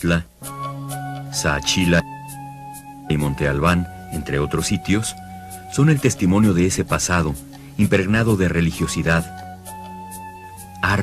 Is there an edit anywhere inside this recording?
yes; 1 cut; at 4.4 s

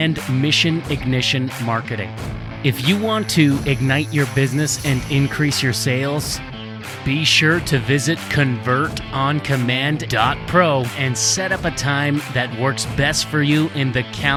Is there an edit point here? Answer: no; 0 cuts

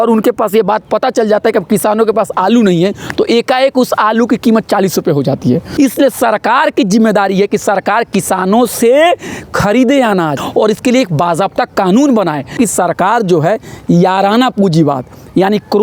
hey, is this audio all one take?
no; 3 cuts; at 5.7 s, 10.4 s, 12.5 s

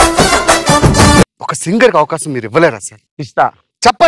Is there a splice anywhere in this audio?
yes; 1 cut; at 1.3 s

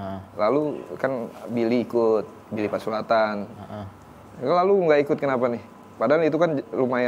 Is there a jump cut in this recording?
no; 0 cuts

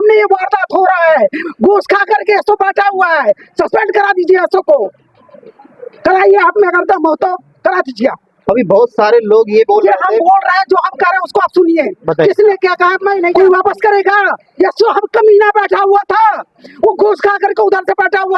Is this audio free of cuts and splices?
no; 1 cut; at 13.3 s

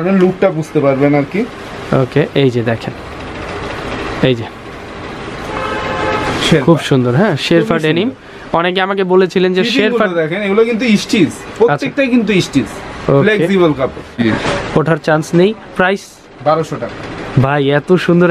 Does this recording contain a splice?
yes; 1 cut; at 14.2 s

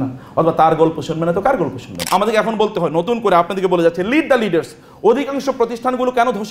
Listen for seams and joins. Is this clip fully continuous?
no; 1 cut; at 1.9 s

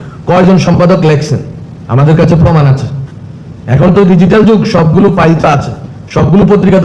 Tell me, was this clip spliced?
no; 0 cuts

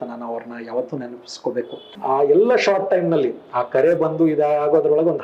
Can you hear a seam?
yes; 1 cut; at 1.9 s

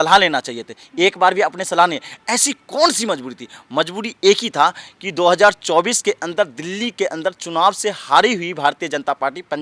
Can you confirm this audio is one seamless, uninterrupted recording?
yes; 0 cuts

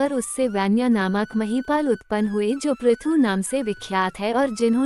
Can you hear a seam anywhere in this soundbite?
no; 0 cuts

